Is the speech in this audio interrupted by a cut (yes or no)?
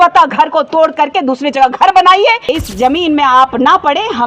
yes